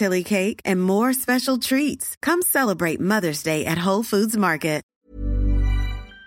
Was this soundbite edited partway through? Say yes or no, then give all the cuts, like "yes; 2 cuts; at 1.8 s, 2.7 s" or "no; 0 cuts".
yes; 1 cut; at 4.9 s